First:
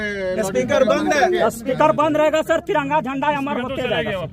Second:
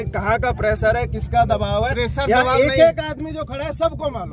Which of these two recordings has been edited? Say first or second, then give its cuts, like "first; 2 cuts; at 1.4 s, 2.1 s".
first; 1 cut; at 1.7 s